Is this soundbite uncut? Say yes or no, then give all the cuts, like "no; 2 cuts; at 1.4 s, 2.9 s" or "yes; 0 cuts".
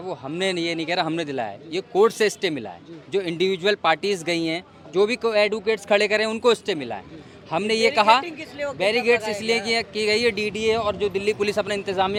yes; 0 cuts